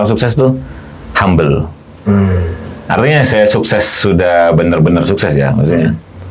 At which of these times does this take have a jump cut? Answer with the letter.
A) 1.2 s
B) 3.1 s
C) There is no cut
C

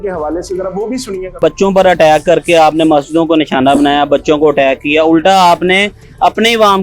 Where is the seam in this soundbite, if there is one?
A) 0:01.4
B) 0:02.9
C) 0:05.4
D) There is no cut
A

